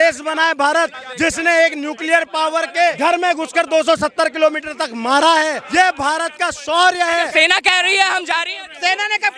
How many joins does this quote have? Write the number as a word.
four